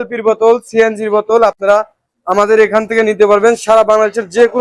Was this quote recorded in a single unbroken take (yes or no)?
yes